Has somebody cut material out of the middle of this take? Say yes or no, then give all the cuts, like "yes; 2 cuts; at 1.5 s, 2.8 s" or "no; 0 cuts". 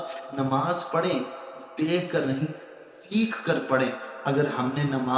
no; 0 cuts